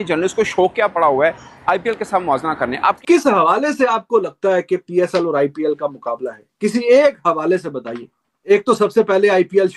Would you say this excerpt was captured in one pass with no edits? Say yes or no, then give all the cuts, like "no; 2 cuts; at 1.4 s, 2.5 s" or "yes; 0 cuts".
no; 2 cuts; at 3.0 s, 8.5 s